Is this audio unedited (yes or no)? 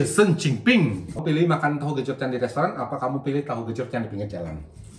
no